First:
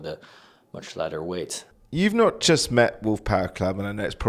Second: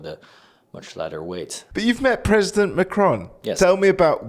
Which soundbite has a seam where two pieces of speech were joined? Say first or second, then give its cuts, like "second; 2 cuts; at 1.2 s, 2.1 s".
second; 1 cut; at 1.6 s